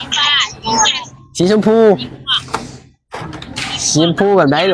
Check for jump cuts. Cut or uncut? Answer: uncut